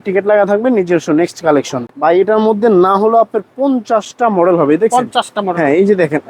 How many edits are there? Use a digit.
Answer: 1